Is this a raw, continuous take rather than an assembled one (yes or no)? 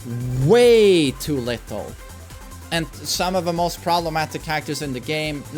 yes